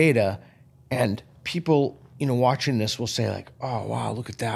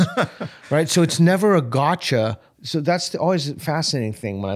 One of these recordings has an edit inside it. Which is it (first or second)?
second